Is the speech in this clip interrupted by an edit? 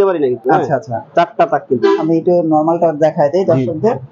no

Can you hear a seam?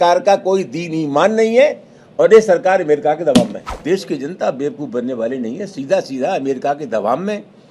yes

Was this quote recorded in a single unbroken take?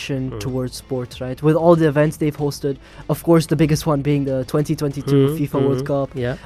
yes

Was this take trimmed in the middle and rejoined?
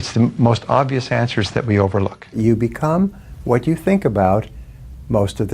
yes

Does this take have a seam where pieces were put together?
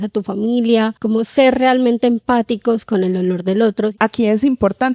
yes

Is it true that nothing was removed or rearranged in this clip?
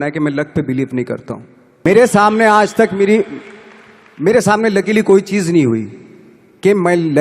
no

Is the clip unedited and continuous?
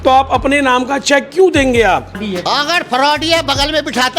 no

